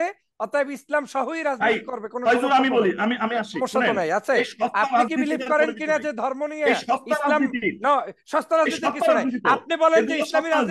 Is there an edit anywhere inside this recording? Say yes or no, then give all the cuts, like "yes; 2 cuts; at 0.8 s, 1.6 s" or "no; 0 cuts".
no; 0 cuts